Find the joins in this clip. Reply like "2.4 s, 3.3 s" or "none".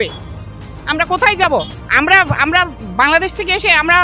1.8 s, 2.8 s